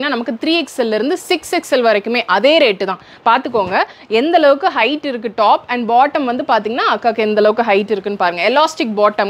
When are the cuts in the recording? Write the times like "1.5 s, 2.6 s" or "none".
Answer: none